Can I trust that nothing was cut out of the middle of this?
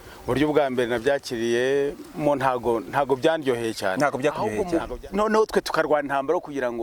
no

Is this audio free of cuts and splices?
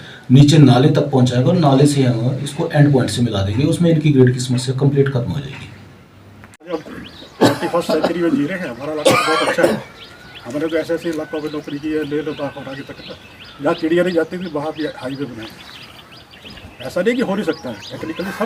yes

